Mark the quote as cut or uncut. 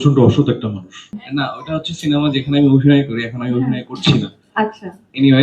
cut